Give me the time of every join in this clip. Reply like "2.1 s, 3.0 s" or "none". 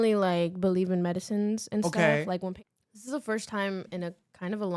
2.5 s